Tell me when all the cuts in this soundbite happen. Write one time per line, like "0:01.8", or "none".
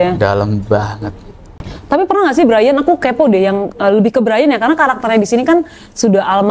none